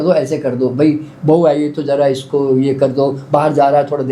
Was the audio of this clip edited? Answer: no; 0 cuts

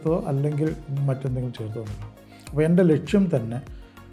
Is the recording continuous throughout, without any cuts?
yes; 0 cuts

